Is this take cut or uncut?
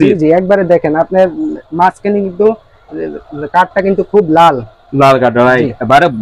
uncut